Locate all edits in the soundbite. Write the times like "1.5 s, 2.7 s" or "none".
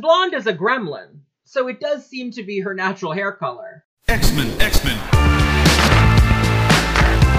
3.9 s